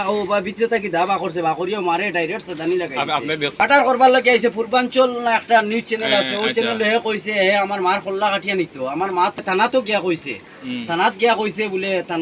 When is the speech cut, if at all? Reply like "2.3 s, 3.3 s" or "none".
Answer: 3.6 s, 9.4 s